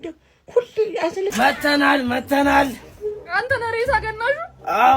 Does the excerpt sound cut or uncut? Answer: cut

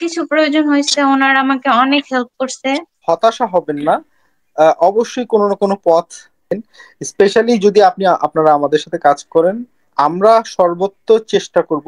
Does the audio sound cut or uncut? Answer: cut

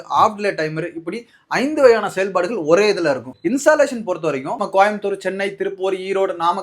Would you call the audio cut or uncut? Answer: cut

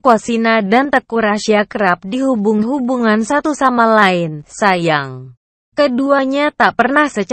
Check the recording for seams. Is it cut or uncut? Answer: uncut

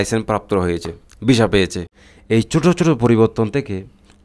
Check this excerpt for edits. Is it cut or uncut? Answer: cut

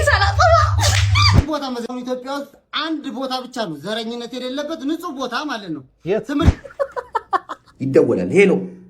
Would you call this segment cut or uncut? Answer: cut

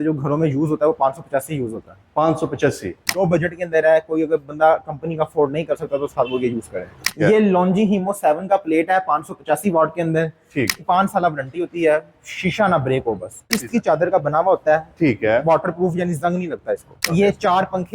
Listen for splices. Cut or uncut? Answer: cut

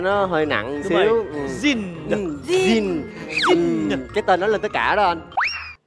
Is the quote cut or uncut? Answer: uncut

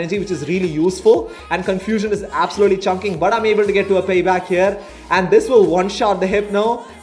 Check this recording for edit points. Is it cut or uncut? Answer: uncut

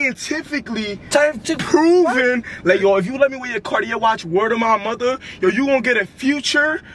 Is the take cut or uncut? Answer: uncut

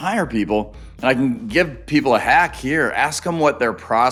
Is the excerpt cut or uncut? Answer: uncut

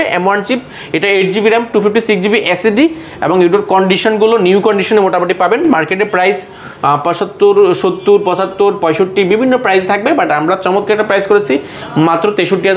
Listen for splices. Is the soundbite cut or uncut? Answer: uncut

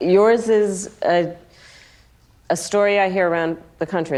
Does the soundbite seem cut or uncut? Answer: uncut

